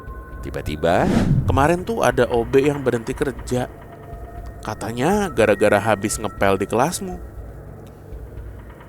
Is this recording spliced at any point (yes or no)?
yes